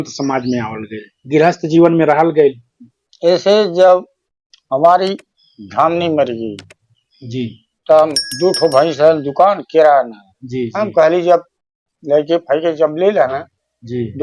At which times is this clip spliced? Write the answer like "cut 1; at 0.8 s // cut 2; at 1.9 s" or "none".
none